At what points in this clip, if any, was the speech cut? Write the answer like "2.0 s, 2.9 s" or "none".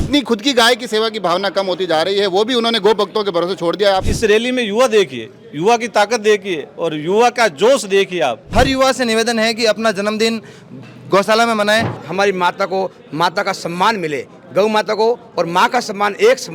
4.1 s, 8.5 s, 12.0 s